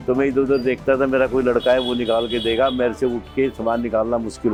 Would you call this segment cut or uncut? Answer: uncut